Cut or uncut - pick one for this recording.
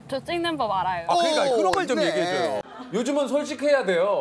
cut